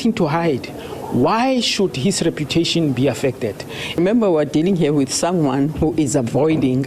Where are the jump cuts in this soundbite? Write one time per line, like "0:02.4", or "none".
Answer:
0:04.0